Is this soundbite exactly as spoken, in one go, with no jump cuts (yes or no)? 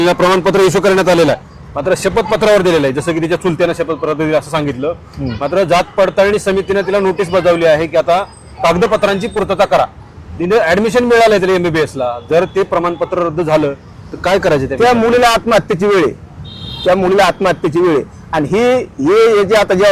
yes